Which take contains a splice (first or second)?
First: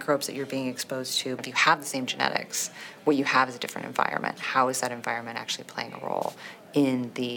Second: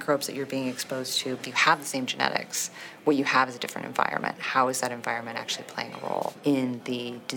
second